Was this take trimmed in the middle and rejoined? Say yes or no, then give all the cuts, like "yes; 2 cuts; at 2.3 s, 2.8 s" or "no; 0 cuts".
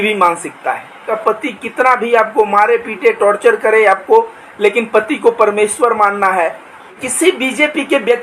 yes; 2 cuts; at 1.2 s, 6.9 s